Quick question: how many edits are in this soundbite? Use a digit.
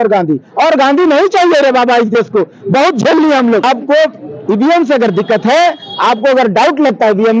1